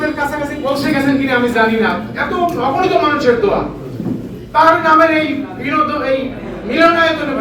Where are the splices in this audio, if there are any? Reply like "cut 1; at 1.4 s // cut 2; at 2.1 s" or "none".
none